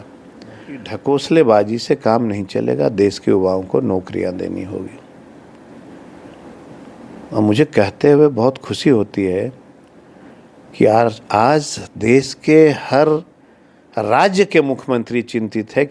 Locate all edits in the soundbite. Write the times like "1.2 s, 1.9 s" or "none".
0.9 s